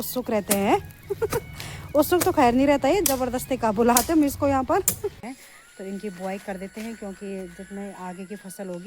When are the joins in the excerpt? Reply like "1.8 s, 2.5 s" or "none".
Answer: 5.2 s